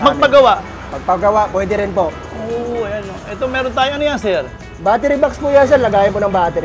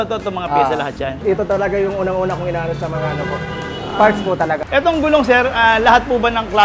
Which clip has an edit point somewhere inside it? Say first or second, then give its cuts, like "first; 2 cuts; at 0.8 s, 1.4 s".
second; 2 cuts; at 1.2 s, 4.6 s